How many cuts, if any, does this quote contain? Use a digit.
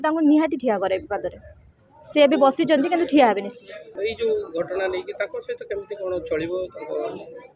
1